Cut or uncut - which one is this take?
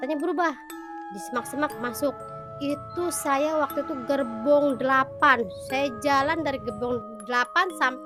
uncut